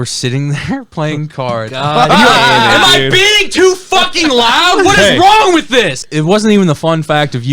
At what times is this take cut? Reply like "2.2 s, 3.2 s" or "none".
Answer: 6.0 s